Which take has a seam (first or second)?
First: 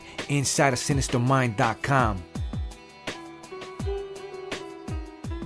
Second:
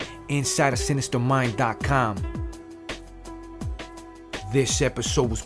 second